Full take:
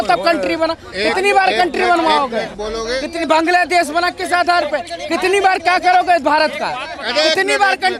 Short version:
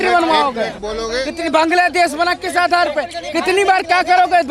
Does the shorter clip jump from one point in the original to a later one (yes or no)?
no